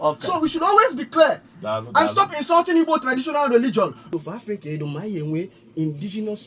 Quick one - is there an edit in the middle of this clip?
yes; 1 cut; at 4.0 s

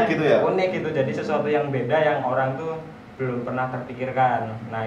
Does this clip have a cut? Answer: no; 0 cuts

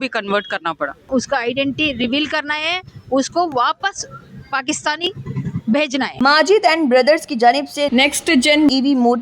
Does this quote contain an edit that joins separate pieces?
yes; 2 cuts; at 1.0 s, 6.1 s

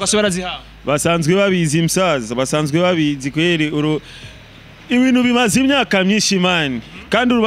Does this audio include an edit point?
no; 0 cuts

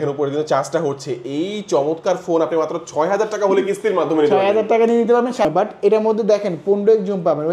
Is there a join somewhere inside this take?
yes; 1 cut; at 5.5 s

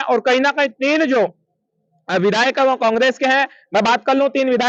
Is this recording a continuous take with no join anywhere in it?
yes; 0 cuts

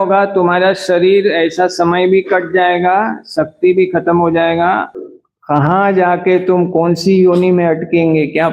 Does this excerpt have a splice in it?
yes; 1 cut; at 4.9 s

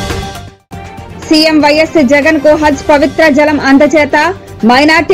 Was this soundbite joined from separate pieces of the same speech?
yes; 1 cut; at 1.1 s

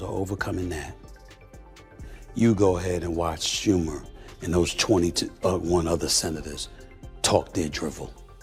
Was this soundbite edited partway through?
no; 0 cuts

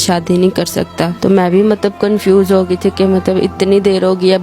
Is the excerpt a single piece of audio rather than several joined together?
no; 1 cut; at 1.1 s

